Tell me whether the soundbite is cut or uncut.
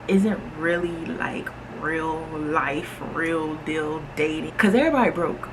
cut